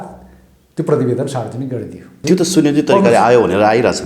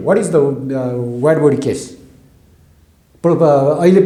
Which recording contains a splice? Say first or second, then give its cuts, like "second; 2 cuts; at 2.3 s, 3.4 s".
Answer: first; 1 cut; at 2.2 s